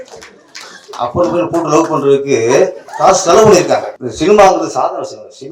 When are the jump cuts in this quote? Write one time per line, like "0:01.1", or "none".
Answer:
0:02.8
0:04.0

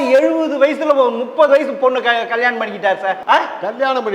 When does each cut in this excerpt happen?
0:03.2

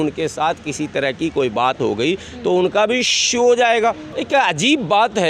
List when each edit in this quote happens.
0:04.1

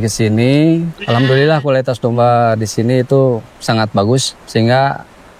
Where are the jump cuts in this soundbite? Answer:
0:00.9
0:03.5
0:04.4

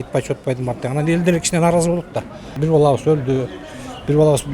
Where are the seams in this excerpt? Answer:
0:02.6

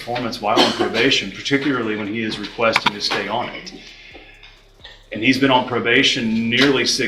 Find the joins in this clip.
none

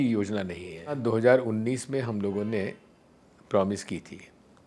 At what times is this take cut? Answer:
0:01.0

